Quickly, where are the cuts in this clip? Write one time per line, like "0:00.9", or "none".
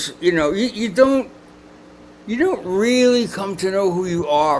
none